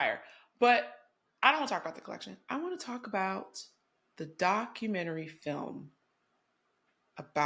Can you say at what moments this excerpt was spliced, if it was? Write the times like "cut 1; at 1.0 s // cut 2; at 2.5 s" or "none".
none